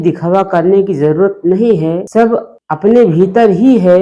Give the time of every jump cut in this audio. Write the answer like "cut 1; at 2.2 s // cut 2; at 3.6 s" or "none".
cut 1; at 2.3 s